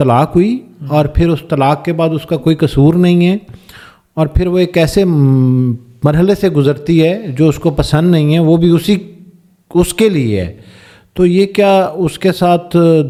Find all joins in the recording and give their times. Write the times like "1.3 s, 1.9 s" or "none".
none